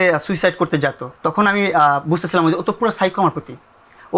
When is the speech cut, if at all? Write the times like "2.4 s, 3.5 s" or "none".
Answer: 1.1 s